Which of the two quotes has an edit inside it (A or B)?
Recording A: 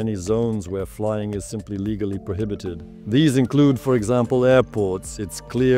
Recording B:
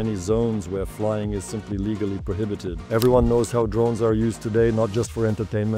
B